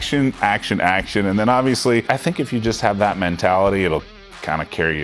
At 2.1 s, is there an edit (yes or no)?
yes